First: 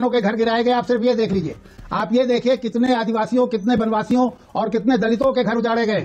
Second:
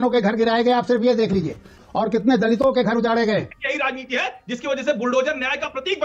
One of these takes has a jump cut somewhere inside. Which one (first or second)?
second